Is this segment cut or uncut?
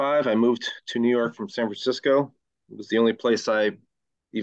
uncut